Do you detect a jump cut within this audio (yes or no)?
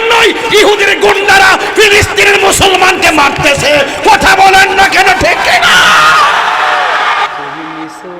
yes